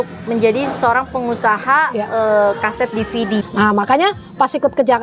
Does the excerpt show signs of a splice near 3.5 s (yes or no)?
yes